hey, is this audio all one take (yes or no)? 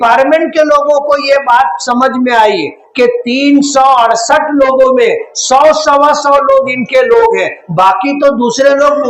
yes